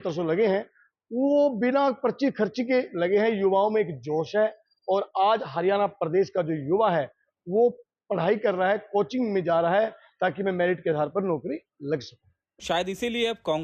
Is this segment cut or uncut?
uncut